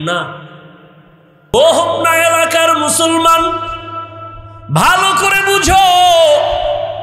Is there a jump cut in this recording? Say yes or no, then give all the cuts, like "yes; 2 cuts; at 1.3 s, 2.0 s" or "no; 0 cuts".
yes; 1 cut; at 1.5 s